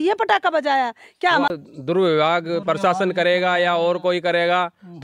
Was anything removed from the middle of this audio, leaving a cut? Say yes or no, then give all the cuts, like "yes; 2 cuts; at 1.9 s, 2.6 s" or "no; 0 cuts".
yes; 1 cut; at 1.5 s